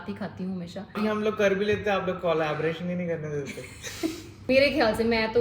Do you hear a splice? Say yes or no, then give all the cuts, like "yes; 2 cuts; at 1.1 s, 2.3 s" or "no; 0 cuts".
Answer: yes; 2 cuts; at 1.0 s, 4.4 s